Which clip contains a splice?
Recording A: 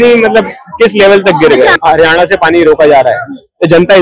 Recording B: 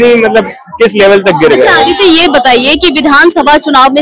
A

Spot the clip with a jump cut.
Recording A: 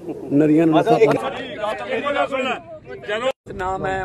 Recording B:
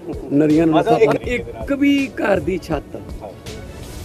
B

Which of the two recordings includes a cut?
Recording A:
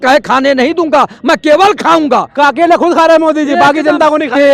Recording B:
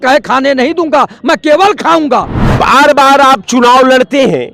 B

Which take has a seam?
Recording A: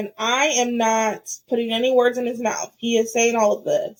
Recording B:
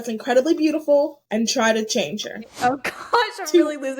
B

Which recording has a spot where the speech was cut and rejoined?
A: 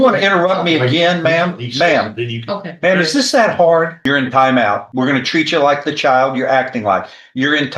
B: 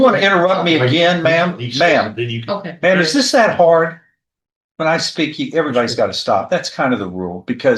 A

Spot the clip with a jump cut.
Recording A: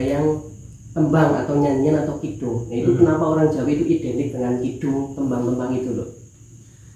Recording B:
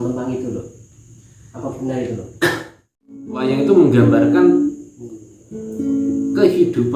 B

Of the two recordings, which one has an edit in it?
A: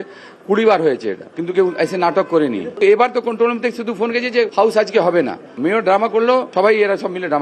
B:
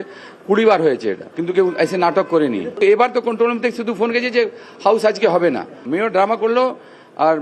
A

